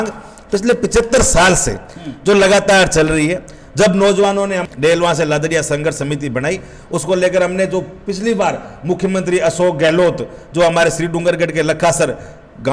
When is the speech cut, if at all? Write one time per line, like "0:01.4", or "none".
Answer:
none